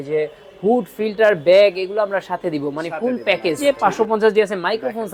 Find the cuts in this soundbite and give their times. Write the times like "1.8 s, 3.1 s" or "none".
3.6 s

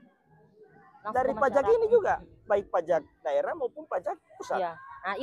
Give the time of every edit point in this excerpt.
none

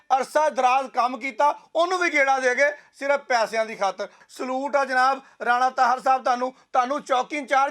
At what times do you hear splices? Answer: 4.2 s

